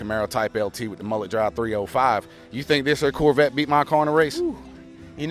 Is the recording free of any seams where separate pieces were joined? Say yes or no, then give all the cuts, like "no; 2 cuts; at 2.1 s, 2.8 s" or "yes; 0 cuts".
yes; 0 cuts